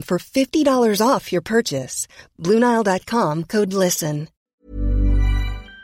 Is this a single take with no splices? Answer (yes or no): no